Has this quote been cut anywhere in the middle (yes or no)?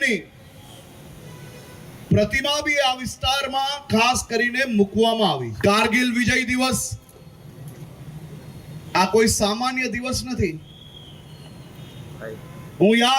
yes